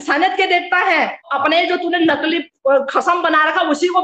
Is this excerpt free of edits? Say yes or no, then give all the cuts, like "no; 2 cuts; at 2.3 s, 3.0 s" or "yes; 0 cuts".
no; 1 cut; at 1.3 s